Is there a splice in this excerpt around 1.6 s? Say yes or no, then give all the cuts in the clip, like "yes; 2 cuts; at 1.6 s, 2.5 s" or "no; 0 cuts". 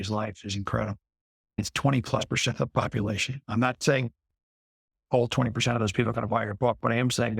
yes; 2 cuts; at 1.6 s, 3.4 s